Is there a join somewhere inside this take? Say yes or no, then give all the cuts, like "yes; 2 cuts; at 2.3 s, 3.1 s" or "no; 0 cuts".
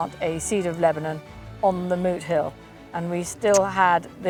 no; 0 cuts